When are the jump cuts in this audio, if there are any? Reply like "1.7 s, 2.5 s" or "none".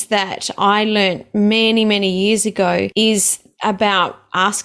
2.9 s